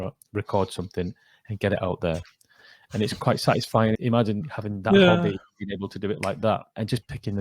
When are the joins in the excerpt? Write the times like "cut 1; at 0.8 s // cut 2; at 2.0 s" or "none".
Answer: cut 1; at 4.0 s